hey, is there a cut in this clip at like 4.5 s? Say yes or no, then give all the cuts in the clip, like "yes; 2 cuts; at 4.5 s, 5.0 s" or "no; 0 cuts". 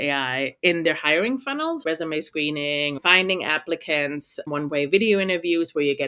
yes; 3 cuts; at 1.8 s, 3.0 s, 4.5 s